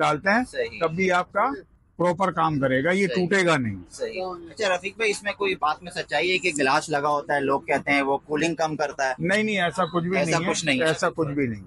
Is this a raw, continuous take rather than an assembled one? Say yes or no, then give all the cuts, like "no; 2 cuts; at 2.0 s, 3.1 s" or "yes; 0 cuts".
yes; 0 cuts